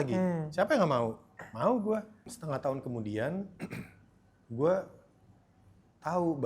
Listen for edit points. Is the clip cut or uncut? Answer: cut